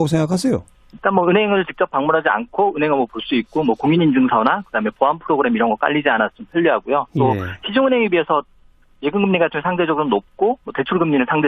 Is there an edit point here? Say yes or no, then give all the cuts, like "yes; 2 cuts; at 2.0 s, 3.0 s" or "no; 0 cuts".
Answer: no; 0 cuts